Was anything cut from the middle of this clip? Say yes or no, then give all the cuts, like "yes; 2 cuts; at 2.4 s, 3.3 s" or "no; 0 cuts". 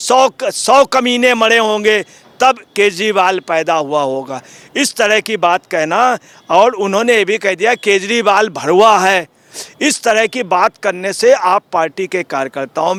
no; 0 cuts